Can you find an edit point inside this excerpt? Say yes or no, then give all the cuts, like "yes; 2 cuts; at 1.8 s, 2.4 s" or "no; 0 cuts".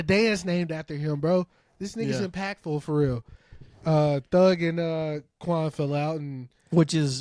no; 0 cuts